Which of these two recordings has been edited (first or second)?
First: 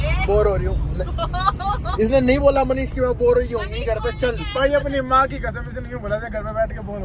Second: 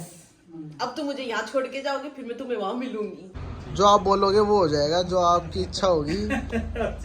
second